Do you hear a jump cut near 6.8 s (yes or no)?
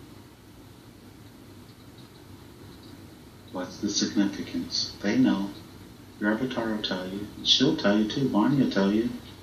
no